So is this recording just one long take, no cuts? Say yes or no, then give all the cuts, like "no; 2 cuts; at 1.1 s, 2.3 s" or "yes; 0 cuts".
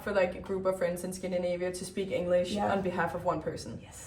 yes; 0 cuts